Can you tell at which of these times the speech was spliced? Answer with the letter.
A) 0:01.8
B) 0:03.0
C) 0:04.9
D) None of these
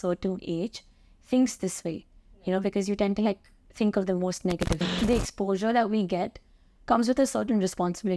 C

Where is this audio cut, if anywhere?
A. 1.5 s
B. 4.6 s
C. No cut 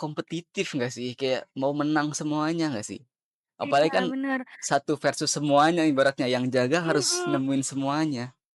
C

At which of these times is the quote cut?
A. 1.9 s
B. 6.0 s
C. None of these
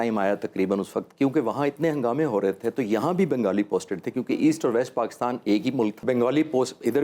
B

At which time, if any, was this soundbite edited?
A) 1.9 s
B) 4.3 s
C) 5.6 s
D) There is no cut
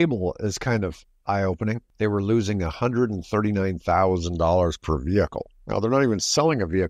A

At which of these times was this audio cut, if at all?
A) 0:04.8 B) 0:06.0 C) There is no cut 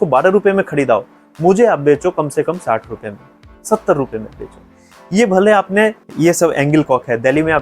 B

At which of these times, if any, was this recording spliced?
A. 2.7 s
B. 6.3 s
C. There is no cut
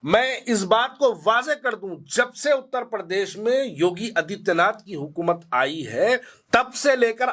B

